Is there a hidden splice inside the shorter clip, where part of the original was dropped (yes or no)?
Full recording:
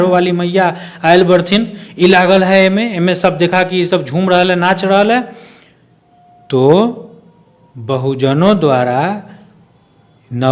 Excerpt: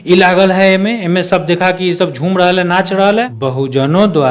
yes